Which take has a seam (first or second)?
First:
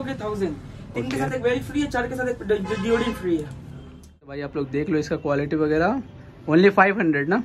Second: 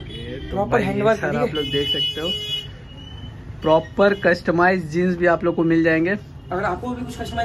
first